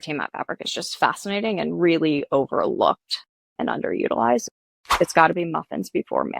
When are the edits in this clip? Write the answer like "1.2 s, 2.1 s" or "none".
4.7 s